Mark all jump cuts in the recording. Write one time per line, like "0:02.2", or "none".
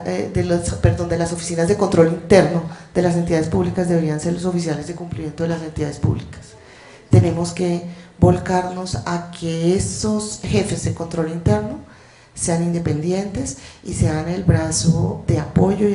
0:04.8